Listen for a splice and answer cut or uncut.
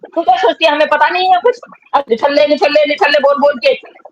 cut